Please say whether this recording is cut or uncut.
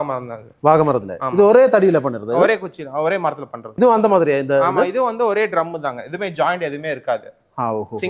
cut